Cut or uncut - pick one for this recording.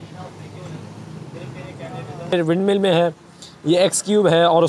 cut